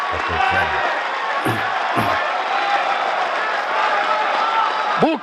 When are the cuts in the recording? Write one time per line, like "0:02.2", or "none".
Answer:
none

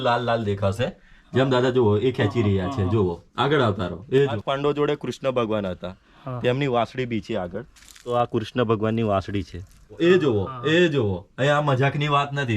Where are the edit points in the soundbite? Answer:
0:04.3
0:08.1
0:10.2

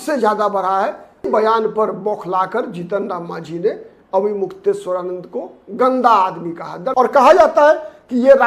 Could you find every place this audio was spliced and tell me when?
0:01.3
0:06.8

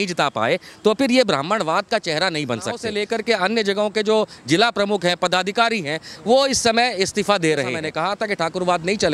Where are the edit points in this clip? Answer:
0:02.9
0:07.8

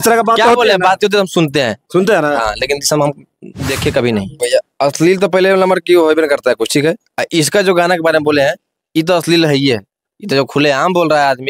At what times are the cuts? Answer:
0:04.4

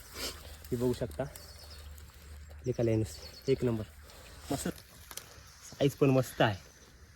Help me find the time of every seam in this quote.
0:04.7

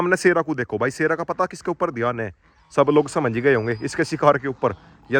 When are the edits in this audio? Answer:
none

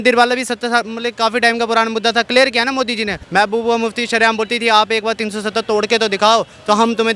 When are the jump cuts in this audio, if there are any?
0:03.2

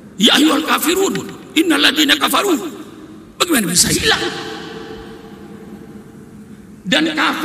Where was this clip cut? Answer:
none

